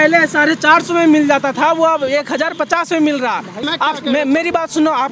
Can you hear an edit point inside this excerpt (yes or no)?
yes